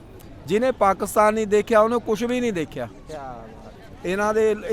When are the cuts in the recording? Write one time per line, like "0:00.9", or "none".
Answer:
0:03.3